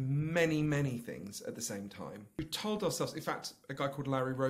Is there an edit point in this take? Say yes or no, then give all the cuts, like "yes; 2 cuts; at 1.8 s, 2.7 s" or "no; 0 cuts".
yes; 1 cut; at 2.4 s